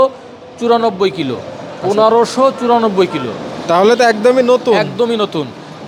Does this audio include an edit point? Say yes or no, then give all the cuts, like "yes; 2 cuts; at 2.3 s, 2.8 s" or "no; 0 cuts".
no; 0 cuts